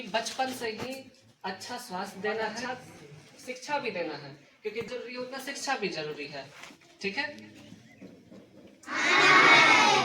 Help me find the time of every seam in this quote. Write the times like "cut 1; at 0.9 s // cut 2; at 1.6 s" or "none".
cut 1; at 2.6 s // cut 2; at 8.7 s